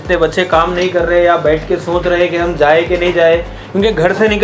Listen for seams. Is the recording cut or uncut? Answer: uncut